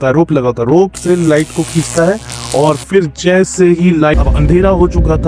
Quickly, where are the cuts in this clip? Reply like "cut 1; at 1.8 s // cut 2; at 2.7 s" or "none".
cut 1; at 4.1 s